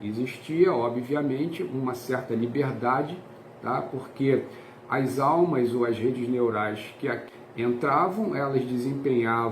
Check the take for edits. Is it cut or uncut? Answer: cut